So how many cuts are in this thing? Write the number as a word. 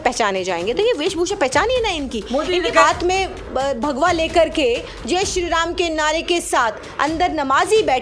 one